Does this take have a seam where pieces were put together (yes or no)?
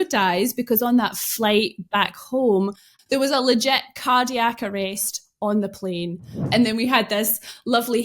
yes